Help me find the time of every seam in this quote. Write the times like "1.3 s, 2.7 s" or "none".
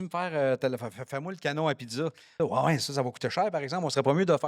2.3 s